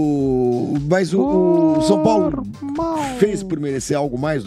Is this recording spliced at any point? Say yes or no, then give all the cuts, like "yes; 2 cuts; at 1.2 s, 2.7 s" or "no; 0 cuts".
no; 0 cuts